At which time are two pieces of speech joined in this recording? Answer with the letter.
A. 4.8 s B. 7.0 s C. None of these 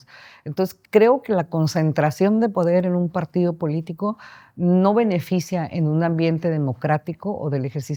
C